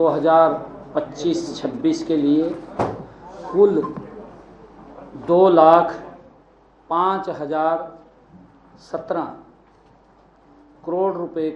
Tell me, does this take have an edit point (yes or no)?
no